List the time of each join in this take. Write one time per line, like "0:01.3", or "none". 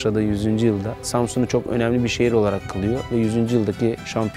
0:01.1